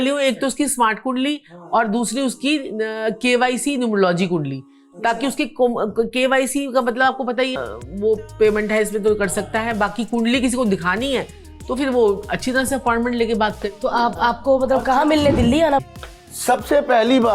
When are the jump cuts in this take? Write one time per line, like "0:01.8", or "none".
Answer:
0:07.7
0:15.8